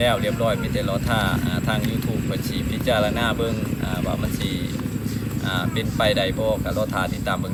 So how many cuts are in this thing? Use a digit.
0